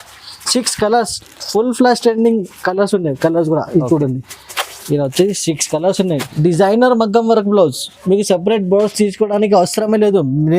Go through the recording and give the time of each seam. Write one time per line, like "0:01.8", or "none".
0:06.3